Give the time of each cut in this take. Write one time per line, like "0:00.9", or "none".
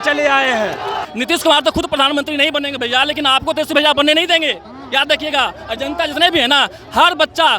0:01.1